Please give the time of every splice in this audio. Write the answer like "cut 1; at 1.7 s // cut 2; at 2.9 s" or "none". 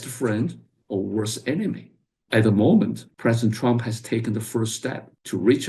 none